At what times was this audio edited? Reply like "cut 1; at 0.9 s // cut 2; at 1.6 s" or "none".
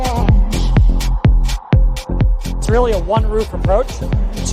none